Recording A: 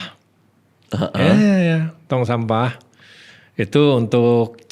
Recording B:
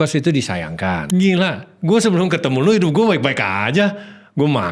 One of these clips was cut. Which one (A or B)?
B